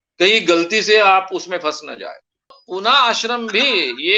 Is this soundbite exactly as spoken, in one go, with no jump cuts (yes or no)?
no